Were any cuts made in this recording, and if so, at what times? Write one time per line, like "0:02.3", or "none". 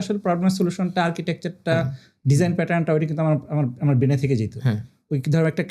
none